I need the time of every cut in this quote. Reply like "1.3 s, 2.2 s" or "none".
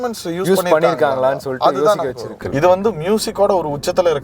2.4 s